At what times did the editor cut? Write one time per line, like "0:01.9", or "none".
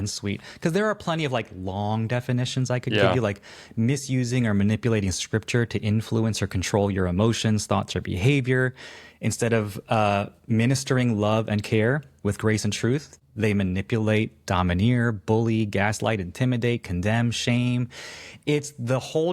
0:13.2